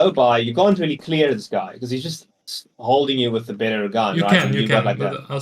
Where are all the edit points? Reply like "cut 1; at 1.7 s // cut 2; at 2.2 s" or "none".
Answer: none